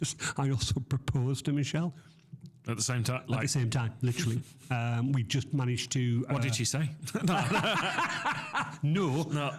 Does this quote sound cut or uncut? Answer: uncut